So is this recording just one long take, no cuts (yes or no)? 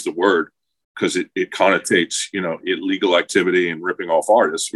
yes